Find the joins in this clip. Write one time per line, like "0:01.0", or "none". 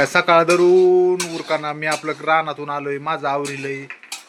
none